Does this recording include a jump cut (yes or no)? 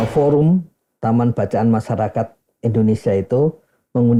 no